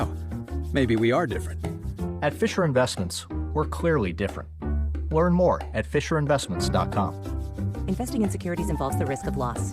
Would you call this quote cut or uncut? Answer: uncut